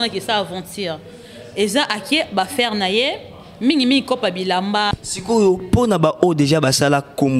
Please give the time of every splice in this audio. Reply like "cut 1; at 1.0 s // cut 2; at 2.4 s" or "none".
cut 1; at 4.9 s